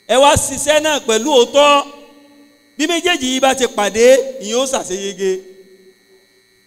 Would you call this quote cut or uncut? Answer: uncut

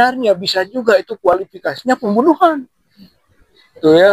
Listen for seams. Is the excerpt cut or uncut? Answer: uncut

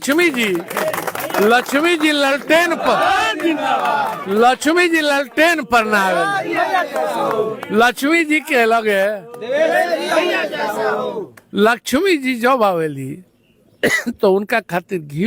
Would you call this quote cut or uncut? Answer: uncut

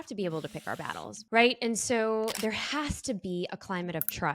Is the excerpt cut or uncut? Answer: cut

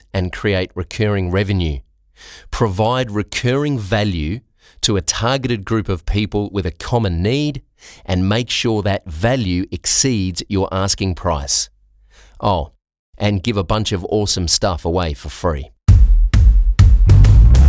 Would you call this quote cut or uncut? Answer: cut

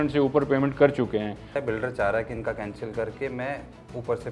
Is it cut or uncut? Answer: cut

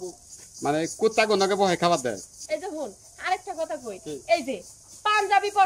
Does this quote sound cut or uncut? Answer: uncut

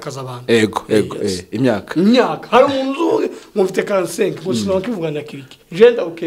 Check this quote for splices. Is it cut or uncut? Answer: uncut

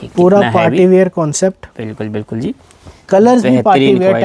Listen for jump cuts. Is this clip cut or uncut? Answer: uncut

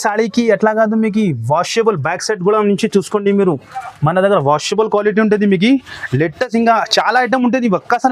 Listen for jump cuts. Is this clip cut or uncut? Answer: uncut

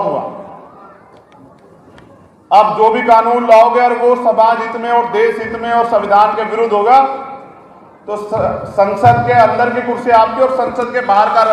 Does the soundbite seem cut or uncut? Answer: uncut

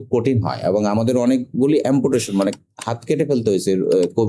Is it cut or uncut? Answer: uncut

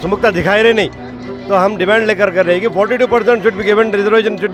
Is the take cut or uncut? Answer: uncut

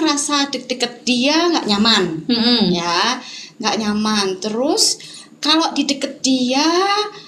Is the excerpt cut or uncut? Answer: uncut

